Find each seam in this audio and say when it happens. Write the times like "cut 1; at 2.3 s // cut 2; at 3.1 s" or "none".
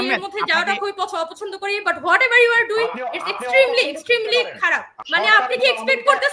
cut 1; at 5.0 s